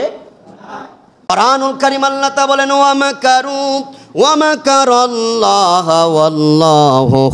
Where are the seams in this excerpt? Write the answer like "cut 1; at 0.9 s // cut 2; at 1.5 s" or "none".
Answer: cut 1; at 1.3 s